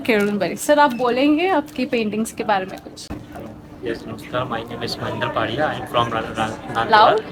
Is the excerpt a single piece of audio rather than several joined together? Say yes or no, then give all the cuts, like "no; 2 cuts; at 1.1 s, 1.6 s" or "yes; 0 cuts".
yes; 0 cuts